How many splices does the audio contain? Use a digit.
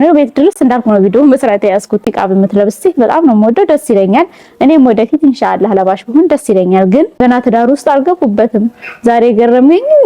2